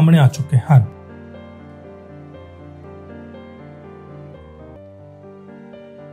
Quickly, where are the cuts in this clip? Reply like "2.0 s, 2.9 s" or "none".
4.8 s

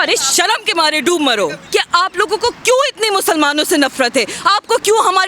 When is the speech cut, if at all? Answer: 1.6 s

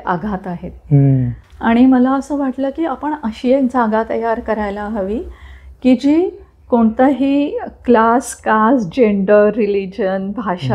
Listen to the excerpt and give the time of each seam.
1.4 s

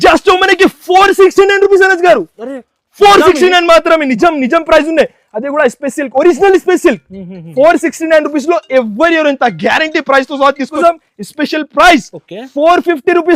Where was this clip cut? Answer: 10.7 s

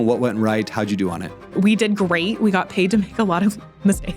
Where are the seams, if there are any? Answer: 1.5 s

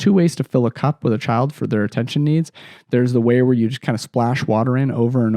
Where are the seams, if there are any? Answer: none

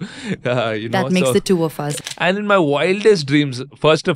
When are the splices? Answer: 1.9 s

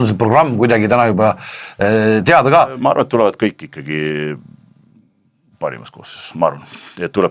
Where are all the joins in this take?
2.8 s

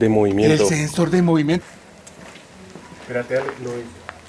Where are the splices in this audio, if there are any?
1.7 s

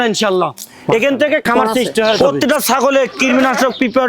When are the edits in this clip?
2.2 s

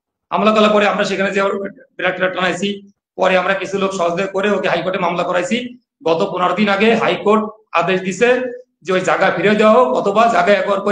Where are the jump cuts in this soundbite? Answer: none

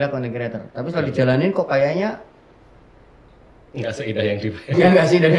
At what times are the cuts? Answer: none

